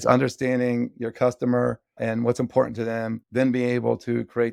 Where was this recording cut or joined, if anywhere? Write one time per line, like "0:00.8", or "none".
0:01.9
0:03.2